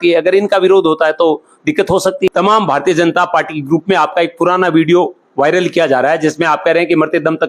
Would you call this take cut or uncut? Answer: cut